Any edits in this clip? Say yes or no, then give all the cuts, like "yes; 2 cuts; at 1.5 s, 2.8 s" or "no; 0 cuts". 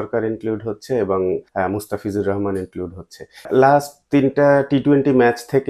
yes; 2 cuts; at 1.5 s, 3.5 s